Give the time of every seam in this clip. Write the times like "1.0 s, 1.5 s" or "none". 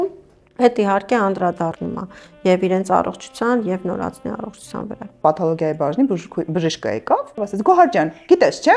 5.2 s, 7.3 s